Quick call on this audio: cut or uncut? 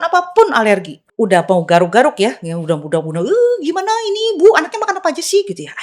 cut